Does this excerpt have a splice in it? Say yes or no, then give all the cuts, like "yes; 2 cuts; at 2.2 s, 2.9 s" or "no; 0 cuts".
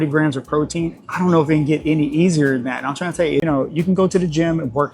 yes; 1 cut; at 3.4 s